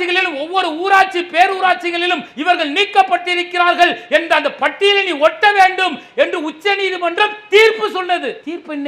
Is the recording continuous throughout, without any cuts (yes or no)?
yes